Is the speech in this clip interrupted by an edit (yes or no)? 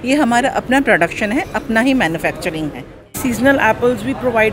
yes